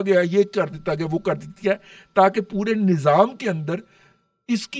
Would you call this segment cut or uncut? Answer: uncut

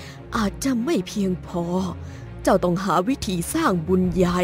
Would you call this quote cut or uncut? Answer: uncut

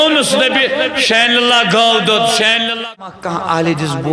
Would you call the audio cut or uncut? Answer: cut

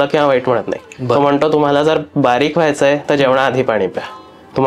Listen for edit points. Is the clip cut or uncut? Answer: uncut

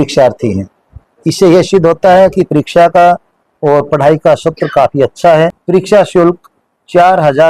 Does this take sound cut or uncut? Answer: cut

